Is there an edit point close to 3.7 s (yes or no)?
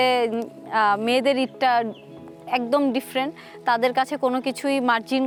no